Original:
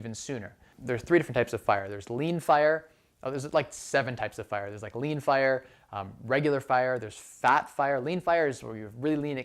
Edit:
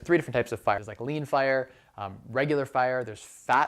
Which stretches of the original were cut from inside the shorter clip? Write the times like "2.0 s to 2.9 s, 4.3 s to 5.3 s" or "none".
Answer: 1.9 s to 4.9 s